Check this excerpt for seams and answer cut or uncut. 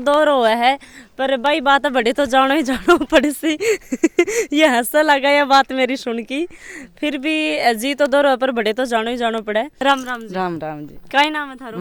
uncut